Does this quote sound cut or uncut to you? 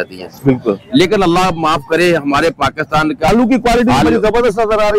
cut